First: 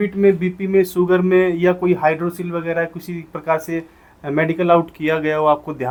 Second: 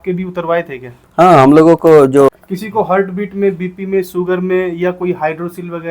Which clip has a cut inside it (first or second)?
second